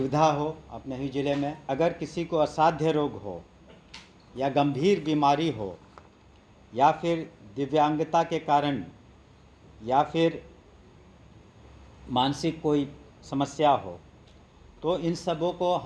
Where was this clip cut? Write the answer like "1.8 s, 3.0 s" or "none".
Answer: 1.6 s

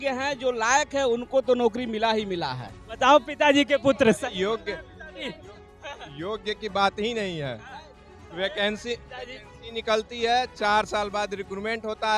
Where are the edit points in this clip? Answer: none

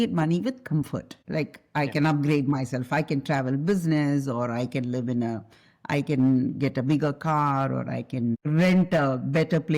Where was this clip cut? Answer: 1.2 s, 8.4 s

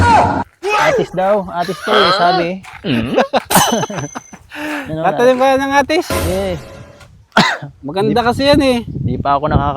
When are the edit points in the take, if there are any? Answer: 1.0 s

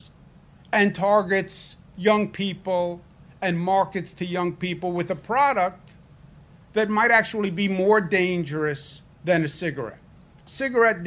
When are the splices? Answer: none

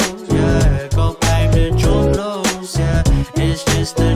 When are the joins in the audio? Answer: 1.2 s

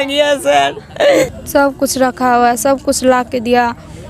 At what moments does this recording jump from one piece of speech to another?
1.0 s

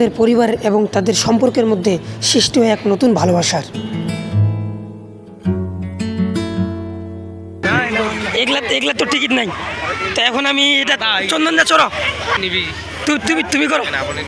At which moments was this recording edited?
none

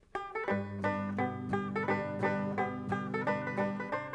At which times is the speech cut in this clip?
3.0 s

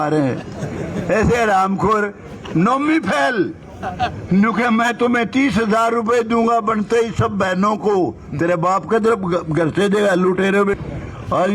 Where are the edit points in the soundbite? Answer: 10.6 s

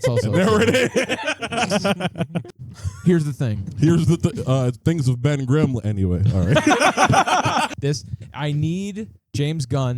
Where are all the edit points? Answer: 2.5 s, 7.7 s

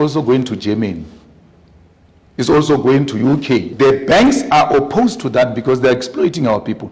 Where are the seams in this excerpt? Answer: 3.7 s

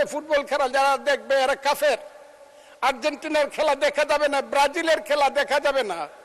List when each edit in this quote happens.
none

